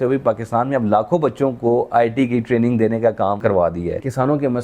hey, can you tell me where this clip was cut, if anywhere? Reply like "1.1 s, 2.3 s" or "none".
3.5 s